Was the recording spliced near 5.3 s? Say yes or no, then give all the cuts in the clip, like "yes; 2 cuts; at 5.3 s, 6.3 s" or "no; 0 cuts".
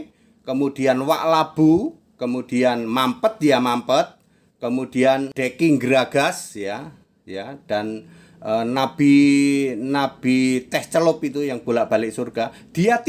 yes; 1 cut; at 5.3 s